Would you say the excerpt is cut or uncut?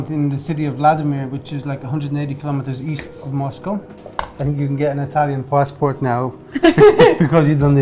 cut